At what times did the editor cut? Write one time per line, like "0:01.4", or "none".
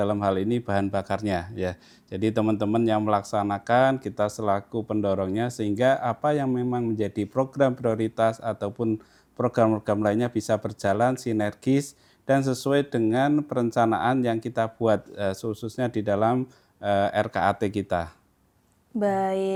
none